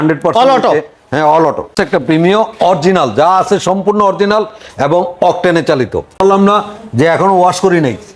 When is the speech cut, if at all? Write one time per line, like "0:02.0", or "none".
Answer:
0:01.7
0:06.1

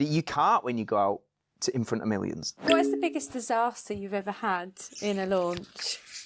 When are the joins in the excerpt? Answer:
0:02.5

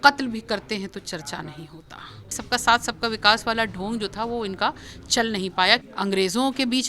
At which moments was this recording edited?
0:02.4
0:05.9

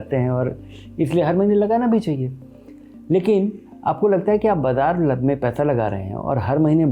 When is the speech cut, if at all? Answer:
none

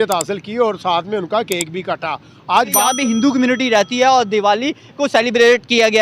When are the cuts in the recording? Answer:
0:02.9

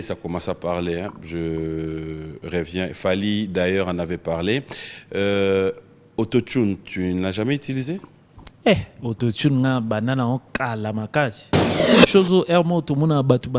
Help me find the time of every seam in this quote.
0:11.9

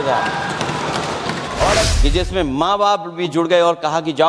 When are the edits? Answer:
0:01.9

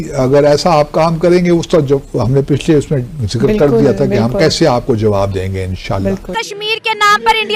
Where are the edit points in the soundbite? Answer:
0:06.3

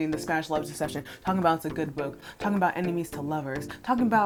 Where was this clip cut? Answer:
none

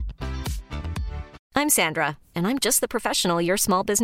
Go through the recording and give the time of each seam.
0:01.4

